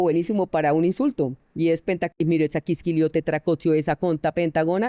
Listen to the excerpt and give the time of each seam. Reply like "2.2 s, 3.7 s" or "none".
none